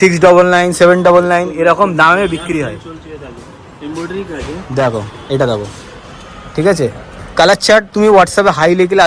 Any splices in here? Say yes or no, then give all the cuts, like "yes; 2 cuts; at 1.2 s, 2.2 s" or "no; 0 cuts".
no; 0 cuts